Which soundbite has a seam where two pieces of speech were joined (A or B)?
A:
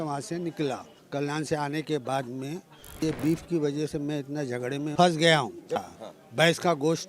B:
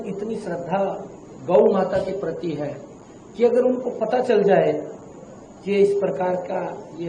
A